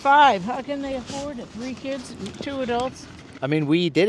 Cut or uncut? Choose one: uncut